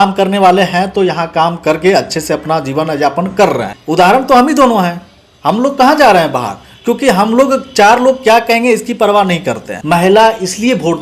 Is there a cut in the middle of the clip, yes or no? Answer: yes